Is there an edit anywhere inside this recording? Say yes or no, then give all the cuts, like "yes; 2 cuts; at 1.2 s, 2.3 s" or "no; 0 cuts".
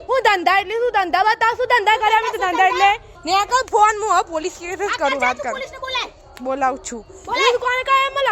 yes; 1 cut; at 3.1 s